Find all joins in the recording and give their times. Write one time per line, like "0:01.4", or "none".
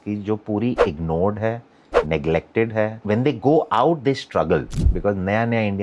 0:03.0
0:04.8